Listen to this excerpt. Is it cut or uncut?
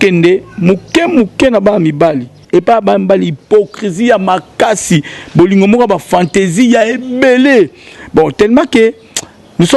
cut